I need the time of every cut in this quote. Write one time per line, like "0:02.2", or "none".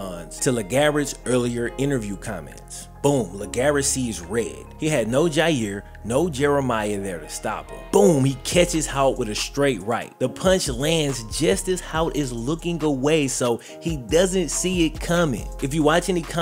none